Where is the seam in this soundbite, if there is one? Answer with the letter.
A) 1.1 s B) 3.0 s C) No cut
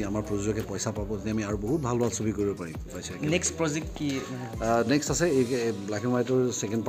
B